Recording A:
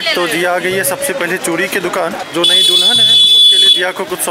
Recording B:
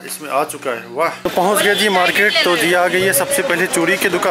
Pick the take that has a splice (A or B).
B